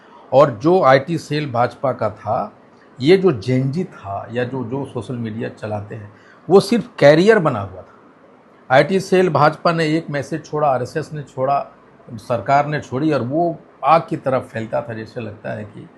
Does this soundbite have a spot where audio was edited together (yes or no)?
no